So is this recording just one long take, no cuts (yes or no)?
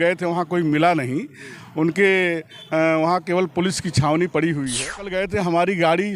no